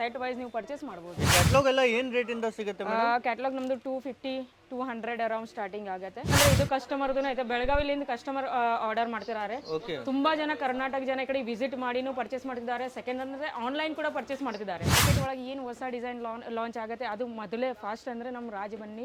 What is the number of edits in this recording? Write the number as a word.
three